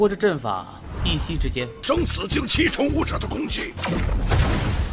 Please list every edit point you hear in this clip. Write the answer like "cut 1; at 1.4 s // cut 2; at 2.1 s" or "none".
none